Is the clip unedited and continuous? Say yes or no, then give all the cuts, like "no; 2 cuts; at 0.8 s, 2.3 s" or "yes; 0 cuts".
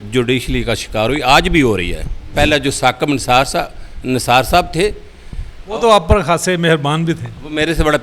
no; 1 cut; at 2.2 s